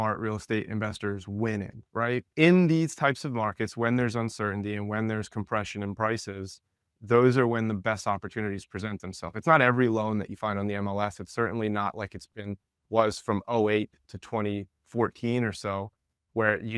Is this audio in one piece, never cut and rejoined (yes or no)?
no